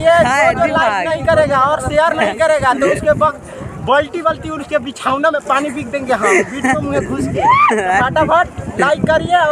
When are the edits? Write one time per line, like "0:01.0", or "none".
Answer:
none